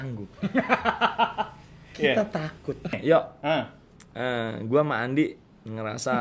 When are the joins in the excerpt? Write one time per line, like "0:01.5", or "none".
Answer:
0:02.9